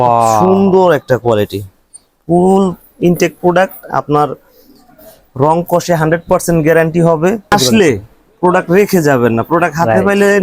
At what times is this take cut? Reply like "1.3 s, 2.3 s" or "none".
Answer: 7.5 s